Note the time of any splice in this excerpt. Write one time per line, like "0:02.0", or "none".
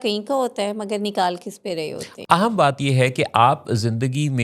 0:02.1